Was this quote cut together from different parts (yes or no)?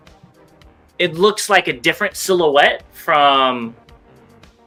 no